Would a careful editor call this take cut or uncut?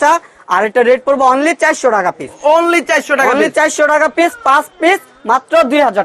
uncut